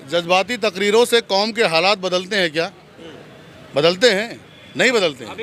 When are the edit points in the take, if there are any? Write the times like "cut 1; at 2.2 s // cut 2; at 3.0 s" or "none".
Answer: none